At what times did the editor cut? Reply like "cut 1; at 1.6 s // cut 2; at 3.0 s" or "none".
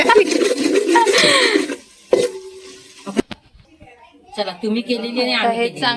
cut 1; at 3.2 s